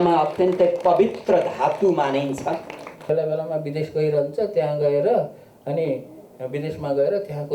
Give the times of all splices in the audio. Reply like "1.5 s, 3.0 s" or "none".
3.1 s